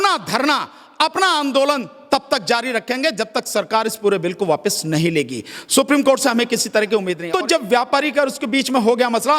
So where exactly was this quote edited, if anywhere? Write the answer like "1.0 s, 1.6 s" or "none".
7.2 s